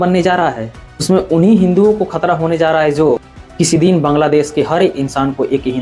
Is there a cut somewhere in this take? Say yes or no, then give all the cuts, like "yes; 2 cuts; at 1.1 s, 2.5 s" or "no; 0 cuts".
no; 0 cuts